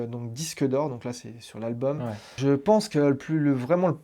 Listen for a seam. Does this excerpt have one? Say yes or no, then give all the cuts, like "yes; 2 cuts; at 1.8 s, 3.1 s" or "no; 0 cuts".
yes; 1 cut; at 2.4 s